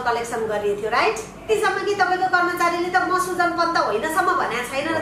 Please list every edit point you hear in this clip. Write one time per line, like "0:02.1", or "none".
0:01.5